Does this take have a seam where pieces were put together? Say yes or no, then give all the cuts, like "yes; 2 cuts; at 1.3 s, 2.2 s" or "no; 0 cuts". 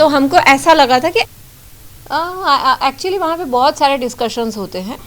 yes; 1 cut; at 1.2 s